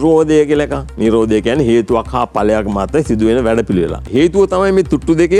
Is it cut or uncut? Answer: cut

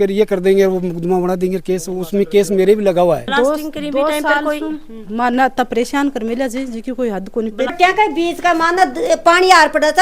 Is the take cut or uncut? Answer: cut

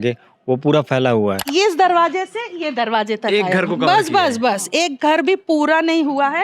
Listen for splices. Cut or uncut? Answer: cut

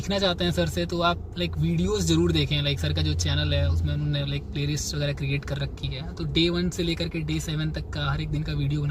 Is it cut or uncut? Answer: uncut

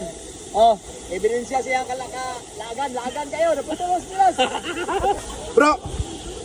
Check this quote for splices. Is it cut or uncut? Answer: cut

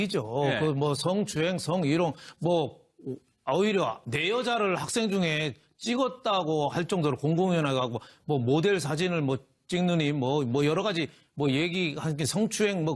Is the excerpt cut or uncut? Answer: uncut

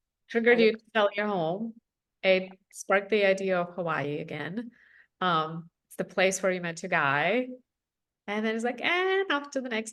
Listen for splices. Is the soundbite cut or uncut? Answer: uncut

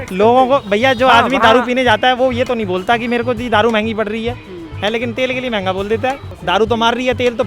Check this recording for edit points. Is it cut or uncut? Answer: cut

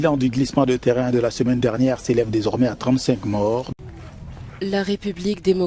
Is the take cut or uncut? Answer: cut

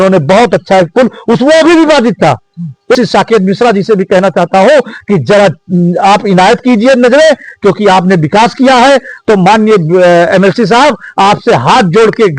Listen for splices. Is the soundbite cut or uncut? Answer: cut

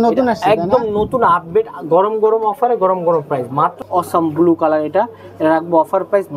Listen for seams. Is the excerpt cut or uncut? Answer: cut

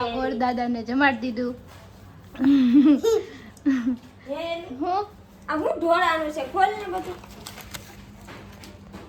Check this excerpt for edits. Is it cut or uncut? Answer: uncut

